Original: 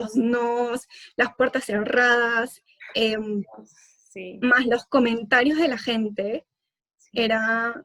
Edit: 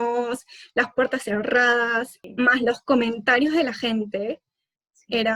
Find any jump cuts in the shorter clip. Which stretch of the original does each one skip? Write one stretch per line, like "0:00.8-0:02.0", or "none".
0:02.6-0:04.2